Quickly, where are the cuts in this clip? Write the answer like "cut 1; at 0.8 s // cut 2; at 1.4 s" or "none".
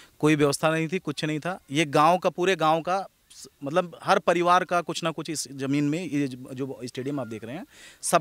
none